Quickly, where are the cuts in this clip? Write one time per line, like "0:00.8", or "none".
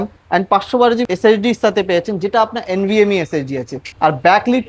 0:01.0
0:03.8